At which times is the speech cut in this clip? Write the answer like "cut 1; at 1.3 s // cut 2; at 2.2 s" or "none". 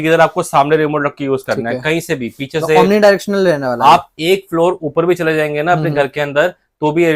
none